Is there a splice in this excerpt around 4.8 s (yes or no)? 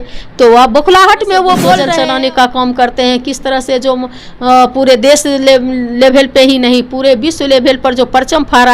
no